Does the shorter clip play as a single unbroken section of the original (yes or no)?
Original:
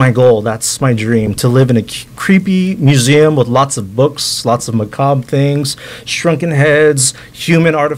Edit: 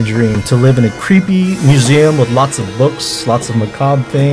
no